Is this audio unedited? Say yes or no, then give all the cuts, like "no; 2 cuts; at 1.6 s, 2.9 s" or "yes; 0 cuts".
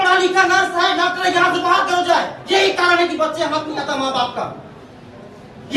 yes; 0 cuts